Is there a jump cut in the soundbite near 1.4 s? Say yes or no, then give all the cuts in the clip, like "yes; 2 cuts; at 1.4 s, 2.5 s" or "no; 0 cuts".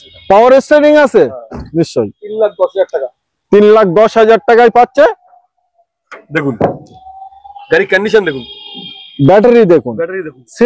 no; 0 cuts